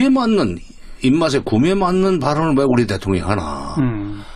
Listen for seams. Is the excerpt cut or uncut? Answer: cut